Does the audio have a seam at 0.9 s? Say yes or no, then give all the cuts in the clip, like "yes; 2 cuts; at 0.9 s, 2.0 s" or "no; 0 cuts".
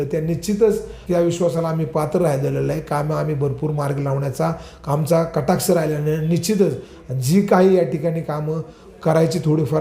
yes; 1 cut; at 0.9 s